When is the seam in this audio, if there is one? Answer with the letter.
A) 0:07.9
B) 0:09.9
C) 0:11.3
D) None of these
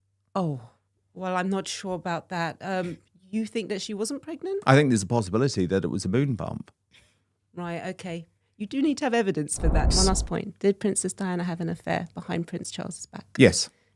B